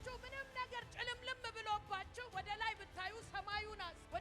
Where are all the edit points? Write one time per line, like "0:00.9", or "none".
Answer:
0:02.2

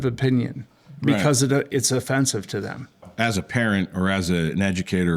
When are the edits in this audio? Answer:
0:03.1

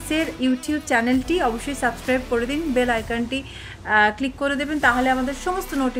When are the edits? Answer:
none

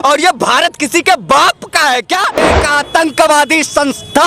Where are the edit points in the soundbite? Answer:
0:02.6

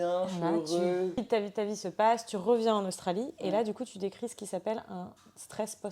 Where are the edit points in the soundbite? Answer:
0:01.2

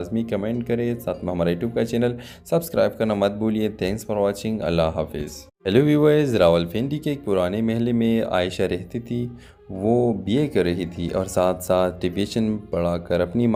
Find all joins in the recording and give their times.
none

